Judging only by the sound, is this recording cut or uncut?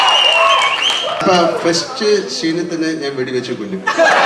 cut